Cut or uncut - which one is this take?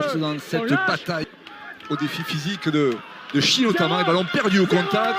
cut